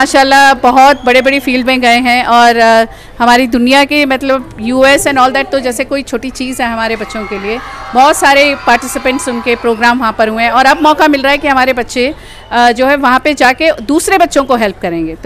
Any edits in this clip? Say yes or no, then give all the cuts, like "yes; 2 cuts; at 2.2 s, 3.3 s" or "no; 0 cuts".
no; 0 cuts